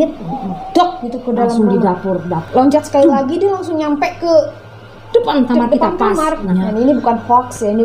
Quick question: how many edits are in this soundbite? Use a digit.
2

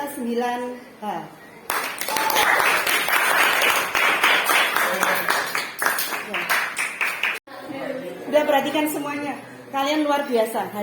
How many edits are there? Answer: 1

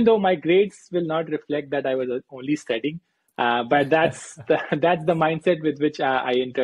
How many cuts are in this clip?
0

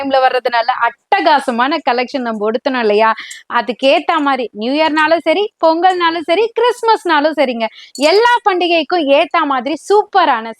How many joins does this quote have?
0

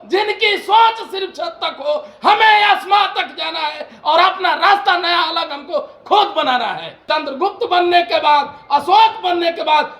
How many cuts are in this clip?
1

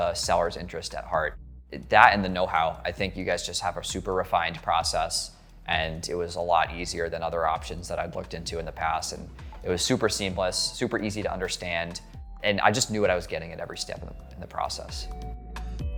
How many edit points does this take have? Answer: 0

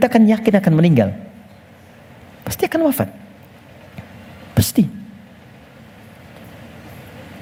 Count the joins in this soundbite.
0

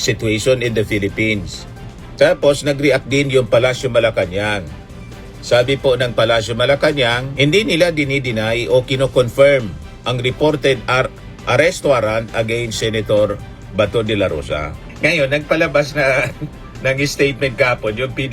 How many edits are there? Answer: 0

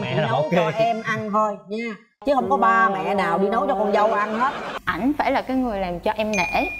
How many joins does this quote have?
1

